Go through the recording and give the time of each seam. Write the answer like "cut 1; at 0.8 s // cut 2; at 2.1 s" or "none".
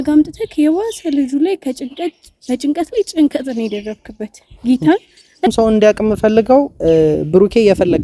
cut 1; at 5.5 s